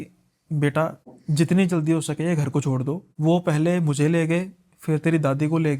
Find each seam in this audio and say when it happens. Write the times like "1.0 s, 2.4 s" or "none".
1.1 s, 3.1 s